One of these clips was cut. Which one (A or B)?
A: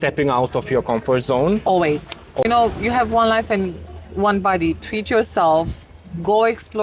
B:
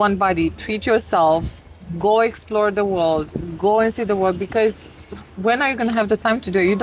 A